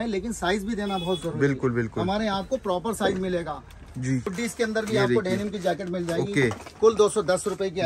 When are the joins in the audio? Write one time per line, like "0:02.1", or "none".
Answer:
0:04.3